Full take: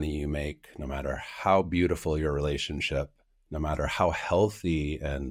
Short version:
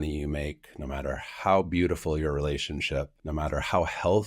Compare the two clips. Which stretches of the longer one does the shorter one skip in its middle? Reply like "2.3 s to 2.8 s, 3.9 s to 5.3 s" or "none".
3.2 s to 3.4 s